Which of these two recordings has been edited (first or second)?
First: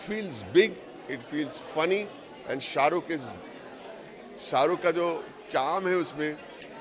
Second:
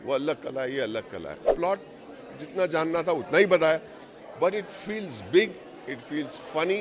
second